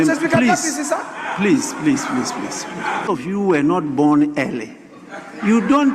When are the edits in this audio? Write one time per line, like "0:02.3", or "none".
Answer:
0:03.1